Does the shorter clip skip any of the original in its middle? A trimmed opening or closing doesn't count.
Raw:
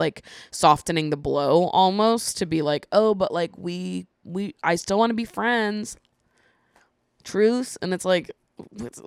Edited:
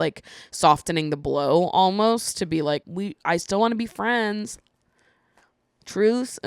yes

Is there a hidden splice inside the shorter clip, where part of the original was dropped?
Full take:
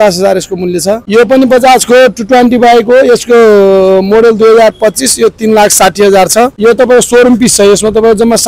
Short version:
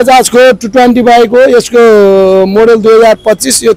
no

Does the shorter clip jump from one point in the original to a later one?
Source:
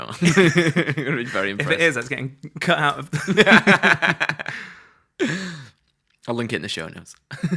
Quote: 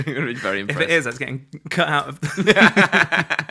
no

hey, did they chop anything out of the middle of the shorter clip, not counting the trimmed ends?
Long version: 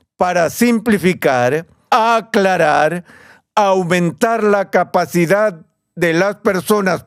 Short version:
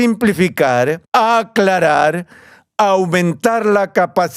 yes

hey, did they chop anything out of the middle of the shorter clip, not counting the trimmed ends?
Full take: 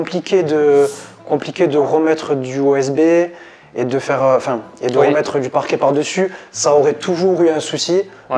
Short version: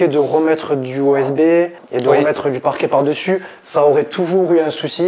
yes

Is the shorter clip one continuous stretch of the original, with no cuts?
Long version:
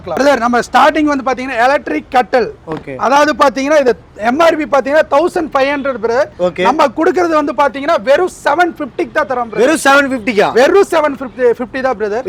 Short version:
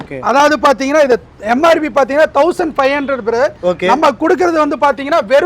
yes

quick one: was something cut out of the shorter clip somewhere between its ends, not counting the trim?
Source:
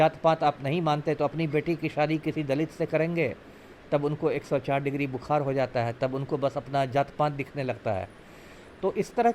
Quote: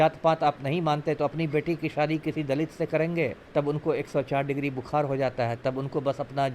yes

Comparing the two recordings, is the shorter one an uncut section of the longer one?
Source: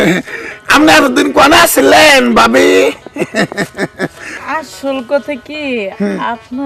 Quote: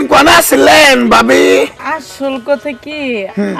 no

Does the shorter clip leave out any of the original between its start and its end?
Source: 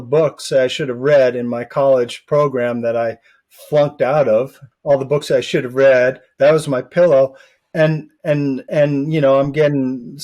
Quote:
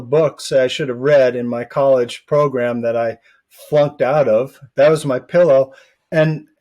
yes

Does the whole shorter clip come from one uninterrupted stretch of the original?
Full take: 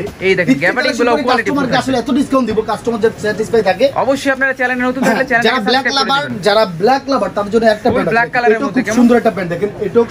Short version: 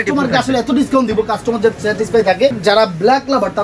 no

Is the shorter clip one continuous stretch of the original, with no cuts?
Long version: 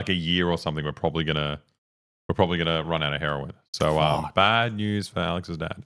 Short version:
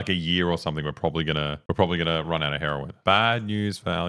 no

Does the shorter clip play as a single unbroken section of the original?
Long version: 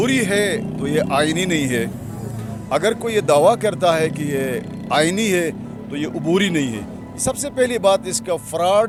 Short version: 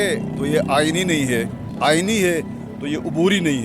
no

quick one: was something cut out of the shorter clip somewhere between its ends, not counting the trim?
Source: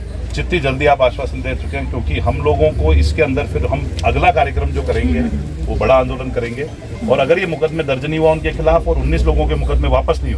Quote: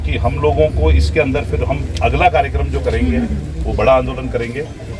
no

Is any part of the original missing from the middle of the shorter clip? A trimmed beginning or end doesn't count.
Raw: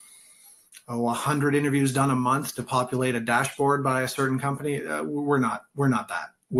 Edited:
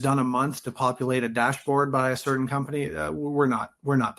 no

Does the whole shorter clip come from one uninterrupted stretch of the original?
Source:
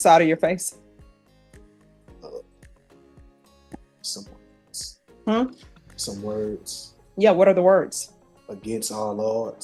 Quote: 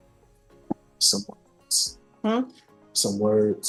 yes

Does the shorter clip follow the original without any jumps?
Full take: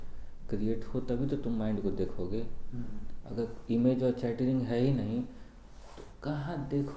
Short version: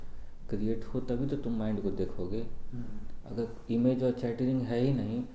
yes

